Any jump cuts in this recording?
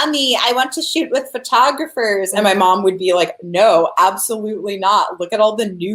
yes; 1 cut; at 2.3 s

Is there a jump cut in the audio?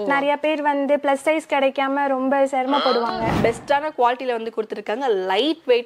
yes; 1 cut; at 3.3 s

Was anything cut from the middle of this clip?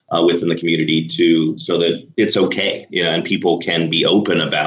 yes; 1 cut; at 2.1 s

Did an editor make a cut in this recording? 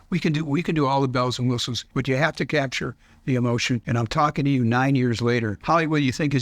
yes; 3 cuts; at 1.9 s, 3.8 s, 5.5 s

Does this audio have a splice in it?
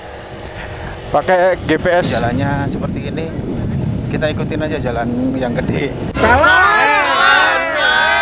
yes; 1 cut; at 2.1 s

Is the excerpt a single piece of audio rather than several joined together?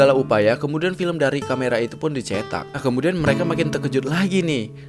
no; 1 cut; at 2.8 s

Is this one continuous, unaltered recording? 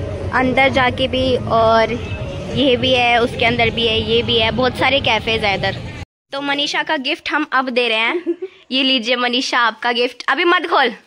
no; 1 cut; at 6.2 s

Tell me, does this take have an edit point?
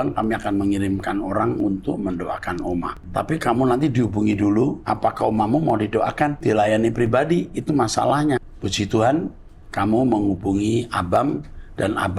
yes; 4 cuts; at 3.0 s, 4.8 s, 6.4 s, 8.6 s

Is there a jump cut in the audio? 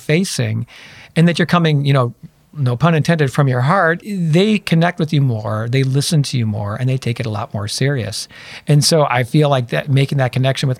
yes; 1 cut; at 4.0 s

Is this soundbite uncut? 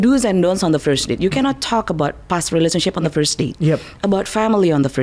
yes; 0 cuts

